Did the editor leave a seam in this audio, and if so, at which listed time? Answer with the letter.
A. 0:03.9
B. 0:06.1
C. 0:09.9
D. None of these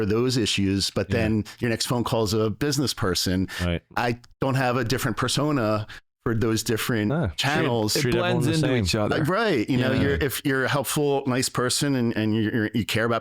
A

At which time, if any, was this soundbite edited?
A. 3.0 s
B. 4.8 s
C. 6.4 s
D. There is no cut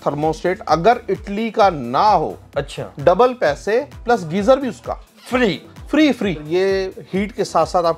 C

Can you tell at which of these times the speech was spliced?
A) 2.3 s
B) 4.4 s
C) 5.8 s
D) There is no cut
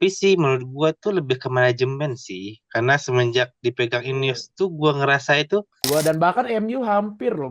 C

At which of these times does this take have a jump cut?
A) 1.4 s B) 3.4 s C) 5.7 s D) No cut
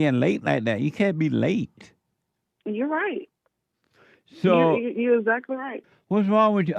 C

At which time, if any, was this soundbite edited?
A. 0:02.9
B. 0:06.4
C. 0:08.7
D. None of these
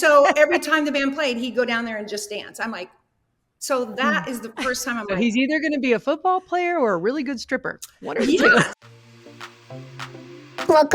C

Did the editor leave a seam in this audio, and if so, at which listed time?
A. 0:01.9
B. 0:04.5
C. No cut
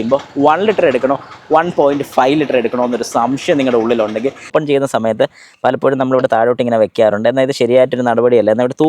B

